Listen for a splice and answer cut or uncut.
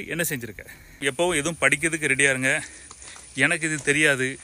cut